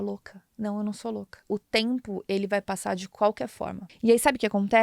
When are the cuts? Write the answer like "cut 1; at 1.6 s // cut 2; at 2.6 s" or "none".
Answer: cut 1; at 1.4 s // cut 2; at 3.8 s